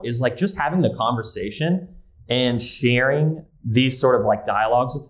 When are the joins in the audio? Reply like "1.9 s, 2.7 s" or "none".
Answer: 3.4 s